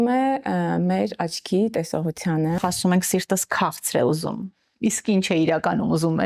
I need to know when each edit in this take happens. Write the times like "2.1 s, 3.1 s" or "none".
2.6 s